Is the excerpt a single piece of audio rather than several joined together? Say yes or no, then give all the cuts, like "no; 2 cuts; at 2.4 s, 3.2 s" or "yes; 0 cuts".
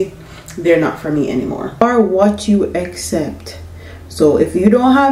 no; 1 cut; at 1.8 s